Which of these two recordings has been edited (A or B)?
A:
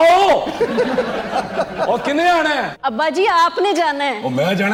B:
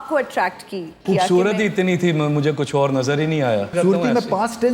B